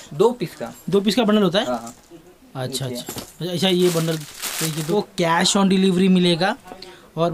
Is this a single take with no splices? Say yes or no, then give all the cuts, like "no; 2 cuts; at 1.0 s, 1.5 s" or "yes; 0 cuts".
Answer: no; 1 cut; at 4.8 s